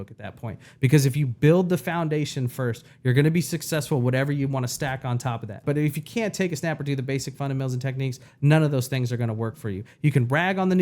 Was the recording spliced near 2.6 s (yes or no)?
no